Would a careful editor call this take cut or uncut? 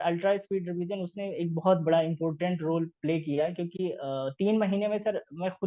uncut